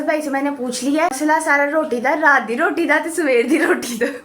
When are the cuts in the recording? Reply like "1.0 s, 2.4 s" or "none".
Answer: 1.2 s